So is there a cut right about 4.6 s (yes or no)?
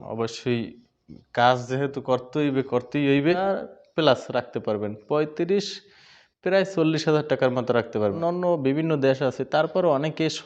no